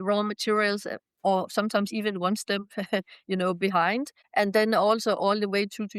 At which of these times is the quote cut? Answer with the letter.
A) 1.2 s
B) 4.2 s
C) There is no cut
B